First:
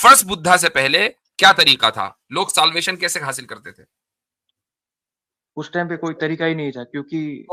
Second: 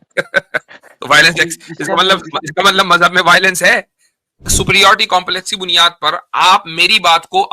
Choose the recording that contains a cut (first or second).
second